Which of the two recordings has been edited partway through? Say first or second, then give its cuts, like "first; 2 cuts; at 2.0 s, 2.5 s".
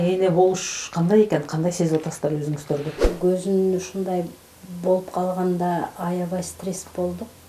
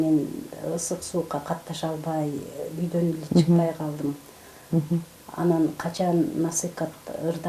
first; 1 cut; at 3.0 s